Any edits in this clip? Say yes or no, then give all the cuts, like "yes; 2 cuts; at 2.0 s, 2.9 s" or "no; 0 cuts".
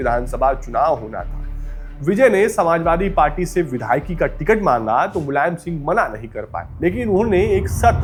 no; 0 cuts